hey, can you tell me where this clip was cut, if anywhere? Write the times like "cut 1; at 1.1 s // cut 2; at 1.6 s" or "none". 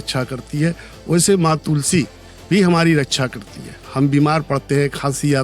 none